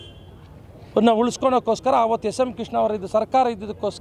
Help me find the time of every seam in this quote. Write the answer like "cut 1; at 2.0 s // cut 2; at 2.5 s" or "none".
none

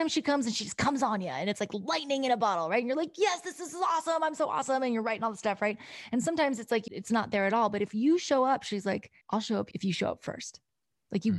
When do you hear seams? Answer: cut 1; at 6.9 s // cut 2; at 9.6 s

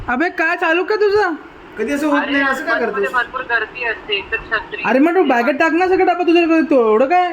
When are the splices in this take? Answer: none

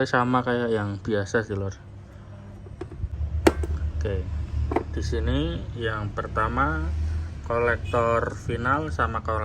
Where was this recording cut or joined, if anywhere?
cut 1; at 3.1 s

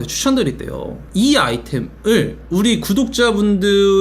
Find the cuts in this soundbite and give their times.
cut 1; at 0.9 s

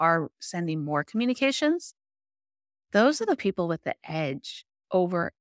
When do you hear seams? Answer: none

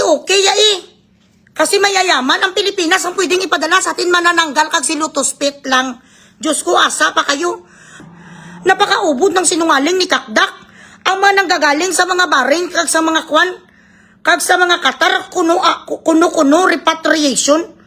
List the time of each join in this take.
cut 1; at 8.0 s

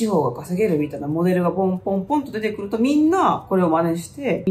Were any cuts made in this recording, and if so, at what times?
none

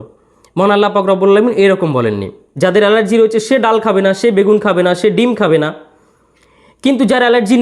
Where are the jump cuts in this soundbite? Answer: cut 1; at 2.4 s

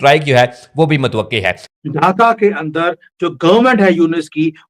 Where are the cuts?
cut 1; at 1.8 s

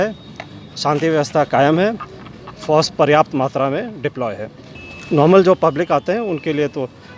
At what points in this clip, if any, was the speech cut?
none

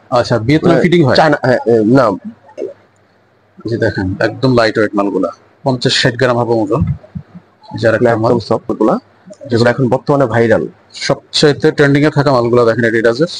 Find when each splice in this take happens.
cut 1; at 2.6 s // cut 2; at 8.7 s

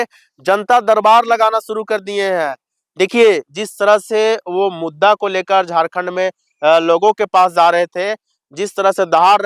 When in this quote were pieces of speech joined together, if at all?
none

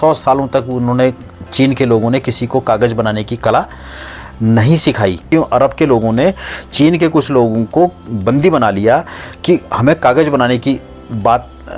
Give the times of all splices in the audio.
cut 1; at 5.3 s

